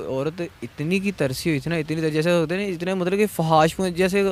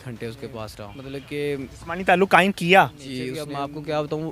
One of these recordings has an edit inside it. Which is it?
second; 2 cuts; at 1.0 s, 3.4 s

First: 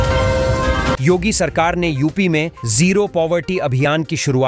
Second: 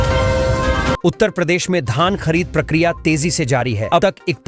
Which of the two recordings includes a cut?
second; 1 cut; at 1.0 s

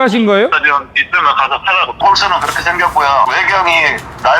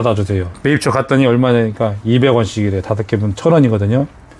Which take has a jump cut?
first; 1 cut; at 1.9 s

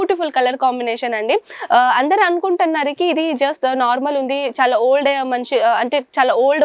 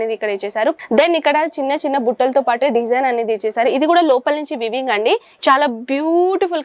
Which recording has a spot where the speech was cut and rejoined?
second; 2 cuts; at 0.8 s, 5.3 s

